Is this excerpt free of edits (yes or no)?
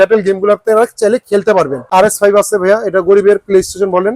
no